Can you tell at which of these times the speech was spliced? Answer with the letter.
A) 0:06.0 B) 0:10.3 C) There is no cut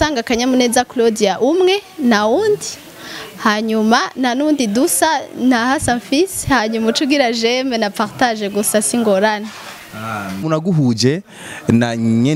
B